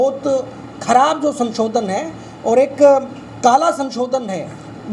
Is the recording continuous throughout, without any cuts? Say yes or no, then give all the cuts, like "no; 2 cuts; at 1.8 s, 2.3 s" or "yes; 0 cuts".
yes; 0 cuts